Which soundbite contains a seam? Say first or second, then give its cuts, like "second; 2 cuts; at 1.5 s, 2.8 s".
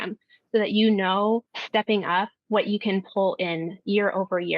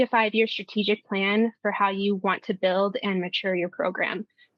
first; 1 cut; at 1.6 s